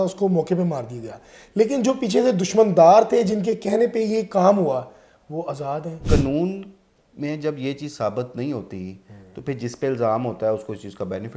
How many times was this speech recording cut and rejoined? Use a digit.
1